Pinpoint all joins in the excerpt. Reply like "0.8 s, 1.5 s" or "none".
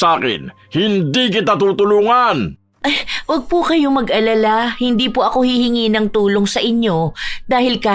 2.6 s